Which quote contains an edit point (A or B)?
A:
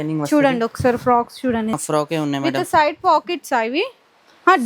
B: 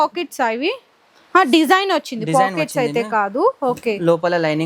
A